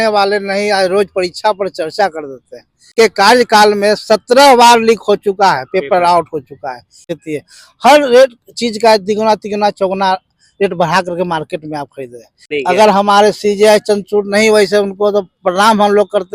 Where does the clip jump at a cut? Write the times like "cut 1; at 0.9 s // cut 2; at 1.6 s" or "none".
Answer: cut 1; at 2.9 s // cut 2; at 7.1 s // cut 3; at 12.5 s